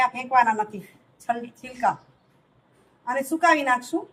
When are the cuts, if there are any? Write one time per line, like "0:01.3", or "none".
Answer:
none